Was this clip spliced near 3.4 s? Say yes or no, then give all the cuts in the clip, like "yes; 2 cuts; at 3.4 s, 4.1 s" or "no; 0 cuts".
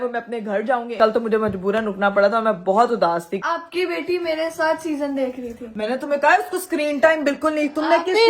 yes; 2 cuts; at 1.0 s, 3.4 s